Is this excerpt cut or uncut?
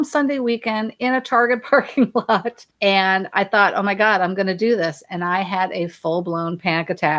cut